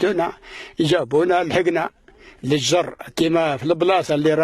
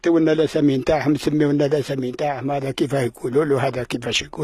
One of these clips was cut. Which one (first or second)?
first